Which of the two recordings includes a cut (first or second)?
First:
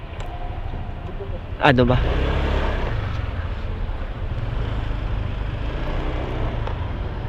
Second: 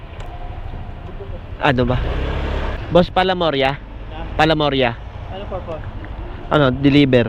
second